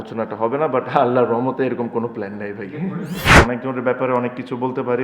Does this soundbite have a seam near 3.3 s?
yes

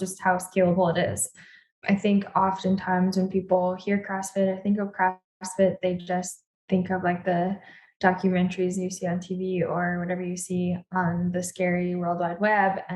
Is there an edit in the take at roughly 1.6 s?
yes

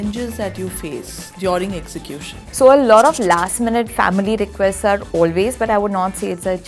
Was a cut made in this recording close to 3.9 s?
no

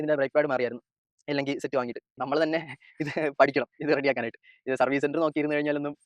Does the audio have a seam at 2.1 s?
yes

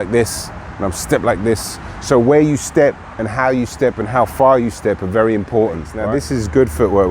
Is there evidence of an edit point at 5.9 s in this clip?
yes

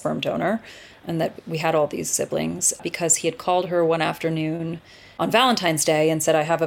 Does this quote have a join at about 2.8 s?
yes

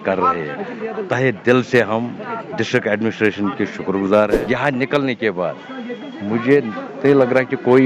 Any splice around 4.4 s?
yes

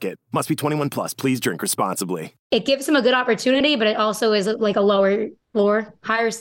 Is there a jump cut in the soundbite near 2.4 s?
yes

